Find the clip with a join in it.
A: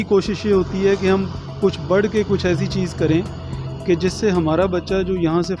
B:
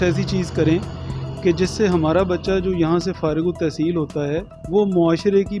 B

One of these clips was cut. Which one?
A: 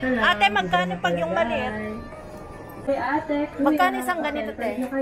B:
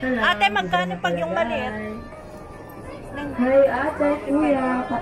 A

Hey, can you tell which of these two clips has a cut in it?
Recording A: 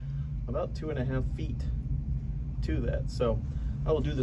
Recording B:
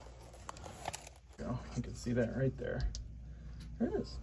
B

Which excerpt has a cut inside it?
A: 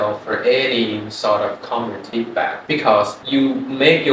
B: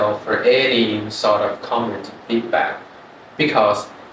A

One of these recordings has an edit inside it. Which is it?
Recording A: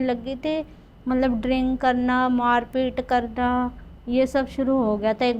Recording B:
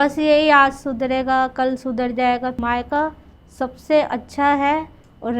B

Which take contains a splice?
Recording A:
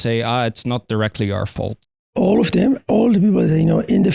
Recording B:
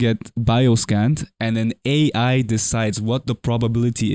A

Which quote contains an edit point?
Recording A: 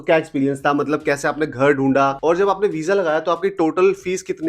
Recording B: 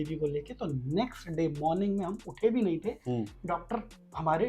A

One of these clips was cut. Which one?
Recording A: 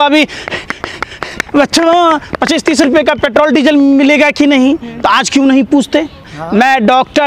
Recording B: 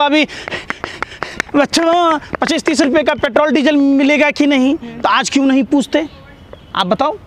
A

